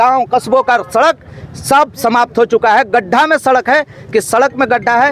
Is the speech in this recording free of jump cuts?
yes; 0 cuts

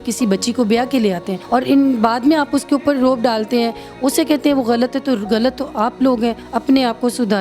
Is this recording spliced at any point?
yes; 2 cuts; at 1.3 s, 6.5 s

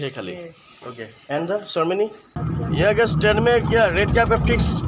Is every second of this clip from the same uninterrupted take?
no; 1 cut; at 2.3 s

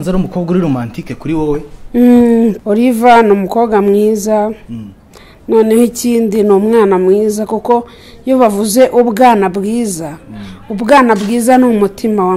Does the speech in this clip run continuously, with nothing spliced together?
no; 1 cut; at 2.6 s

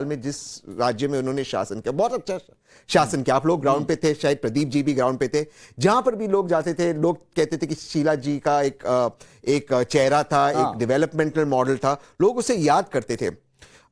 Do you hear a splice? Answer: no; 0 cuts

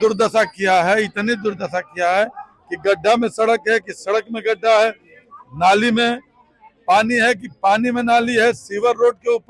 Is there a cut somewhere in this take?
no; 0 cuts

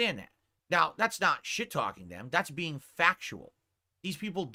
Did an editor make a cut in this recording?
no; 0 cuts

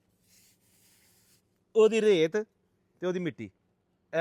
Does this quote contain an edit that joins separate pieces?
no; 0 cuts

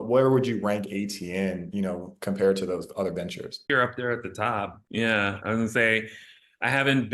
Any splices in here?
yes; 1 cut; at 3.6 s

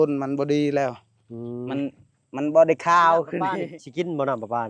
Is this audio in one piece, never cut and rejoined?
no; 1 cut; at 3.6 s

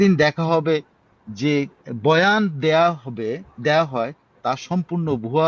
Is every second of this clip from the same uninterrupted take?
yes; 0 cuts

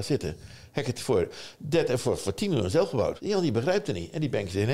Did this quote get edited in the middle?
yes; 1 cut; at 3.2 s

